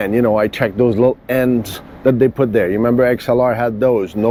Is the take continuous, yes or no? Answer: yes